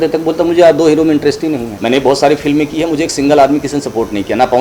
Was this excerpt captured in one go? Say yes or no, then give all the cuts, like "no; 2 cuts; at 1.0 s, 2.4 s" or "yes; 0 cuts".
no; 1 cut; at 1.7 s